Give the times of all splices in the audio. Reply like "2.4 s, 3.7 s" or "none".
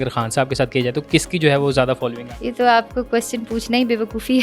1.0 s, 2.3 s